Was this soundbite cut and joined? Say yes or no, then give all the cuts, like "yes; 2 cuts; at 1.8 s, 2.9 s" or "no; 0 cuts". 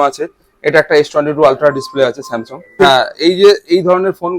yes; 1 cut; at 2.7 s